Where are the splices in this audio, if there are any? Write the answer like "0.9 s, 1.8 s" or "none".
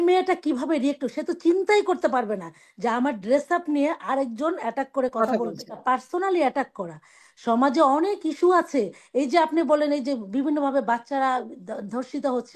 5.8 s